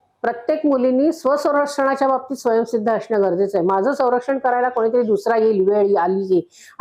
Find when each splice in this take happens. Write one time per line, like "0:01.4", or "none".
none